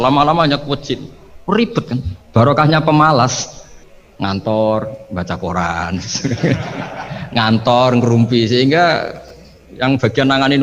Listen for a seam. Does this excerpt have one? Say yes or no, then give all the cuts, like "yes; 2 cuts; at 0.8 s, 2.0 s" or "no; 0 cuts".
no; 0 cuts